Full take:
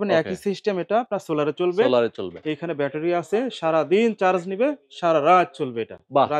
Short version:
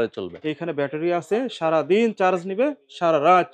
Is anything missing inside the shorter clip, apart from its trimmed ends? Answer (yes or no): no